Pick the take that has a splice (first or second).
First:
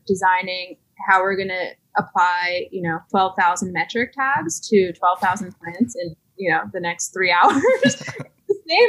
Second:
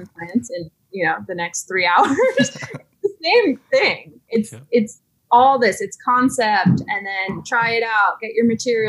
first